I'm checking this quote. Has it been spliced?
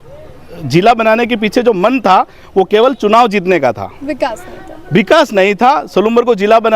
no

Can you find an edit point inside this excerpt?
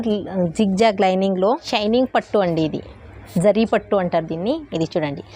yes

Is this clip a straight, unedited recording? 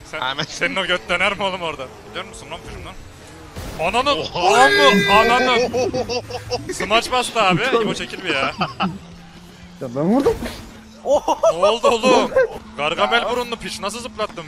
no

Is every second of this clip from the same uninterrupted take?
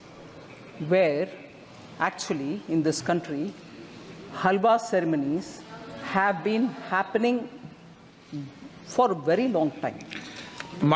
yes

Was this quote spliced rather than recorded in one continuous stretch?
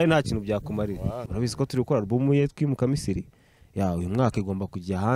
yes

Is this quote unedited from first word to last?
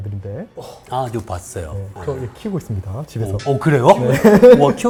yes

